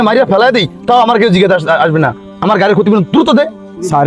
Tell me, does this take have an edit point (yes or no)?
no